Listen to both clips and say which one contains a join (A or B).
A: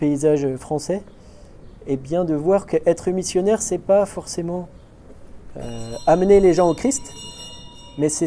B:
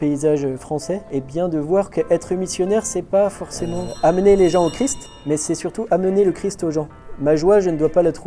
B